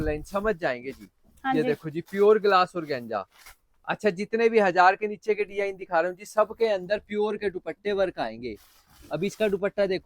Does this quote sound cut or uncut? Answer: uncut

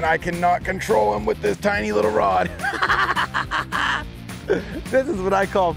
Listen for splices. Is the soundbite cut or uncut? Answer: uncut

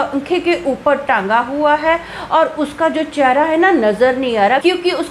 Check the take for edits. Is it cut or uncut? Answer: uncut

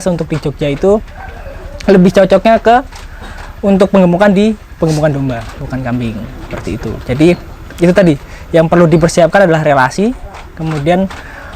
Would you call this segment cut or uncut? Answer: uncut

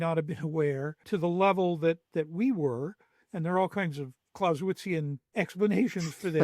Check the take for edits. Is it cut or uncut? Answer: cut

